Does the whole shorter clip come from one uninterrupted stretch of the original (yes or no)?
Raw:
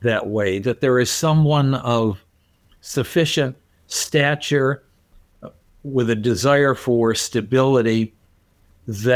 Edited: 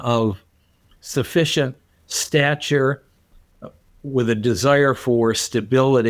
yes